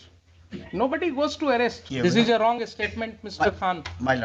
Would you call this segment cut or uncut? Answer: cut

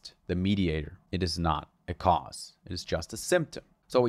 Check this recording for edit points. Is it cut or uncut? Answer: cut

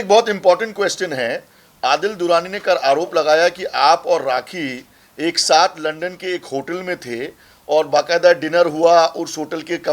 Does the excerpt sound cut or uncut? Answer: uncut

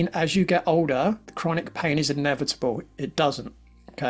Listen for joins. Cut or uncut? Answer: cut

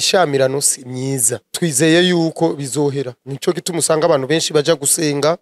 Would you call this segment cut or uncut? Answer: cut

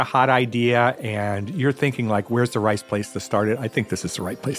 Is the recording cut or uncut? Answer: uncut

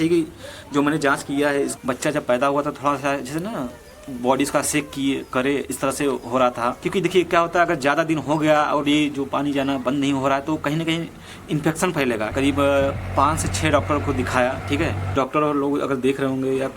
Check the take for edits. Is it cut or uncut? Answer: cut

